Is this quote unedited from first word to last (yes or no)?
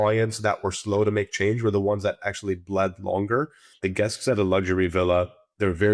no